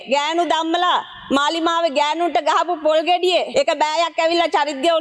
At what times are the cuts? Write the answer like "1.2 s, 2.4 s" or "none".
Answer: 3.5 s